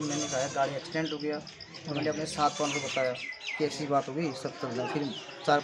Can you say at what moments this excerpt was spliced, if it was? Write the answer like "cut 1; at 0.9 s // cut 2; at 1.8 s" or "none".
none